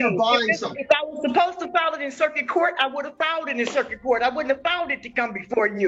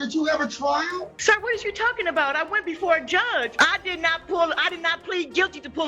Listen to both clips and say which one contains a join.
second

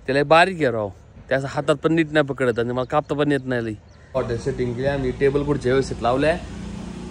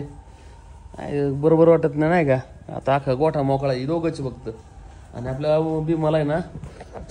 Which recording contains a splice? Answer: first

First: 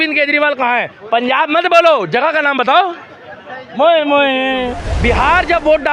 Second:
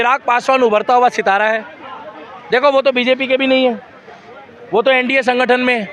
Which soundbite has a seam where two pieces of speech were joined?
first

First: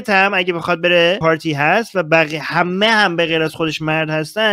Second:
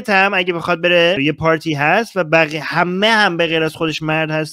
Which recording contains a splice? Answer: first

